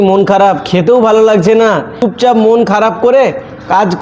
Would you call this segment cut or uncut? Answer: cut